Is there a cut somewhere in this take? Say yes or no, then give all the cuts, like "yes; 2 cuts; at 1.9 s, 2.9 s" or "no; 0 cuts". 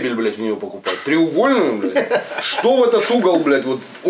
no; 0 cuts